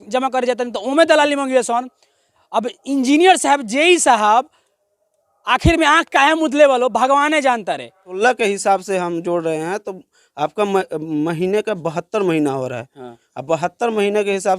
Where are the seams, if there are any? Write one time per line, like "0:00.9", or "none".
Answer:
0:08.2